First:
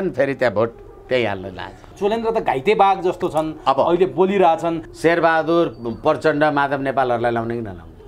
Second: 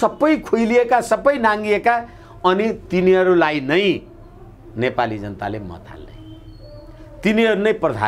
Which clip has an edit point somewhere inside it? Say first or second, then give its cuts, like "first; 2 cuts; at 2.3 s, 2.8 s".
first; 2 cuts; at 1.8 s, 4.9 s